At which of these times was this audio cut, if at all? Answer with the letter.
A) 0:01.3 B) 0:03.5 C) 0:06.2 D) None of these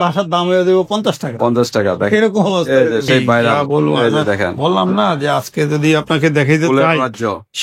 B